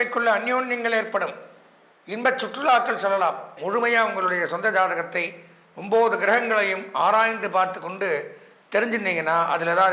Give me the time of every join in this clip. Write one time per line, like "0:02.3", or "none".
0:03.6